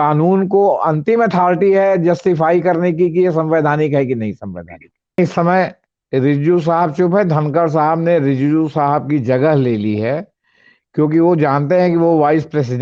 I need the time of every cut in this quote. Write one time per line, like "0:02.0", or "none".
0:05.2